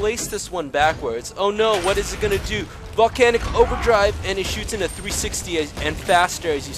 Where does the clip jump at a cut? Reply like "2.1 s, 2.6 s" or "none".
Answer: none